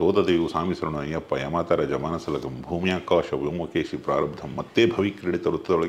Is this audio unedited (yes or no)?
yes